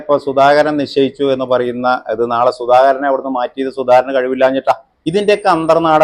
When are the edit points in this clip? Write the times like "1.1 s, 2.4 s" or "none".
4.9 s